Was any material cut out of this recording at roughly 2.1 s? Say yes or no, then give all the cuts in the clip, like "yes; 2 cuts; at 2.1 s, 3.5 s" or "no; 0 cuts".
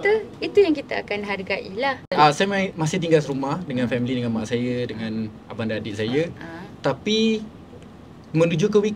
yes; 1 cut; at 2.1 s